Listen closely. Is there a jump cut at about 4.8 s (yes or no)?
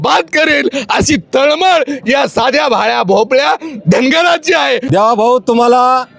yes